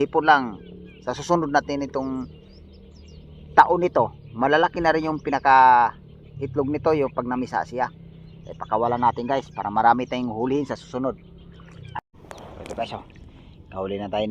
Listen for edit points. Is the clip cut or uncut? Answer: cut